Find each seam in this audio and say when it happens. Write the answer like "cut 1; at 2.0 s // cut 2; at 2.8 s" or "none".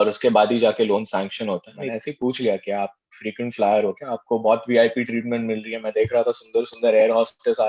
cut 1; at 1.8 s